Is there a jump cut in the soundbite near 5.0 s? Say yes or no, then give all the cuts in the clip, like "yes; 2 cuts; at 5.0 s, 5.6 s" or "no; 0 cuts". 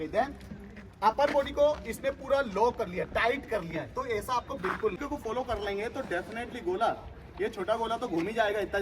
yes; 1 cut; at 5.0 s